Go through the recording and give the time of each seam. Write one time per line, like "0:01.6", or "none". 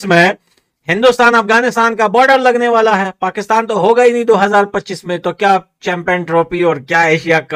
none